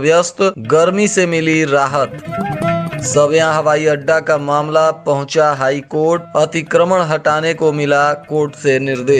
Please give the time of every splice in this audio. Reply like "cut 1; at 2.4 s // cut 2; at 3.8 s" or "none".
none